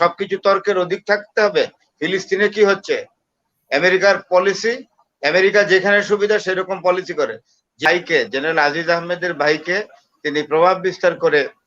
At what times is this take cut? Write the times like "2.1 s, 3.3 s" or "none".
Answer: 7.9 s